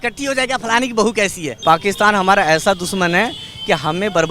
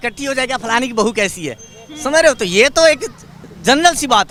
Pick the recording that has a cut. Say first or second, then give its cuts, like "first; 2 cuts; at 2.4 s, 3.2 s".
first; 1 cut; at 1.6 s